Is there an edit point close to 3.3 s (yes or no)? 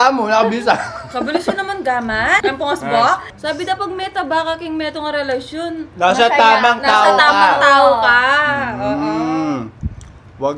yes